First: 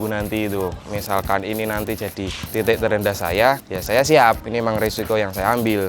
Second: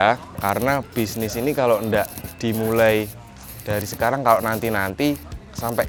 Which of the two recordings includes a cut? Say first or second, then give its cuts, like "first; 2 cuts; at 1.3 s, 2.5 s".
first; 3 cuts; at 0.9 s, 2.4 s, 3.7 s